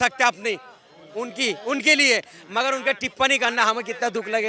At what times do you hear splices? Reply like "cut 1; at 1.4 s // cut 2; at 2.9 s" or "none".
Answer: none